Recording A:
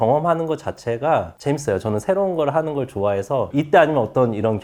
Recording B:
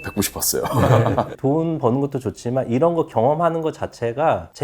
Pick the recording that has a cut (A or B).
B